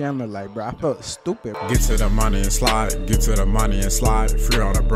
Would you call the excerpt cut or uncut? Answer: cut